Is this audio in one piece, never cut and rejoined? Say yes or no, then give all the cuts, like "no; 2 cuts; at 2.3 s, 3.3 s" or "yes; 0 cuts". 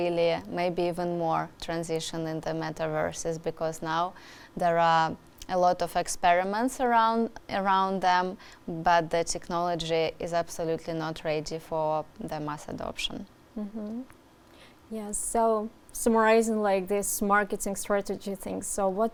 yes; 0 cuts